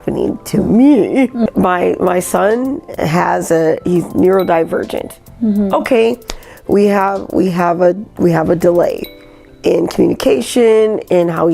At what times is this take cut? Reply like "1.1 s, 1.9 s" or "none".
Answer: 1.5 s

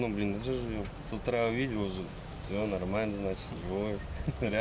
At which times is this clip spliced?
1.0 s

